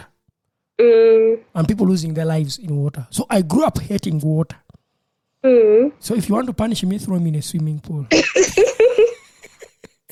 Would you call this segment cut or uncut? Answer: uncut